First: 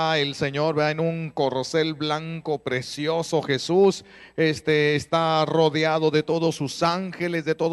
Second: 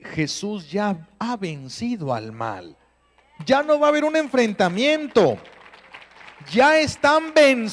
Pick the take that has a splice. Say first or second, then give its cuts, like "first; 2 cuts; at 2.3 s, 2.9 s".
first; 1 cut; at 3.7 s